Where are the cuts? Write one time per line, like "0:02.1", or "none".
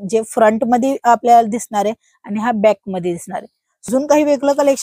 0:03.9